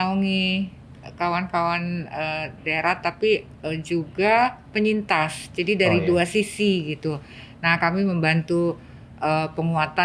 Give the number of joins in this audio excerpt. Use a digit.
0